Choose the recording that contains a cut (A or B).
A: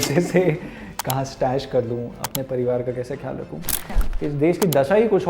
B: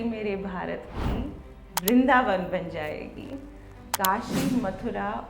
A